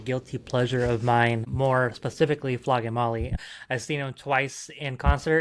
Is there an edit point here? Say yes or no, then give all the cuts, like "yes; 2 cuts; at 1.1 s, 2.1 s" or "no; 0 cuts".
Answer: yes; 2 cuts; at 1.5 s, 3.3 s